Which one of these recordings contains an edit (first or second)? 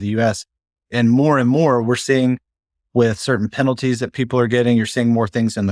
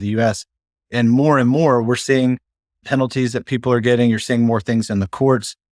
second